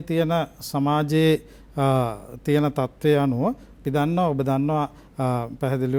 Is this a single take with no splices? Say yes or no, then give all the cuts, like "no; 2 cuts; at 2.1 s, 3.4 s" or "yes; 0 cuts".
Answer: yes; 0 cuts